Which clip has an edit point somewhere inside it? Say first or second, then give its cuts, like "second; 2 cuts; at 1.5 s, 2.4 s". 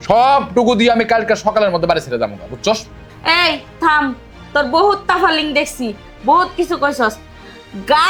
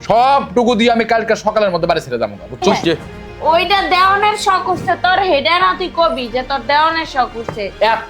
second; 1 cut; at 2.6 s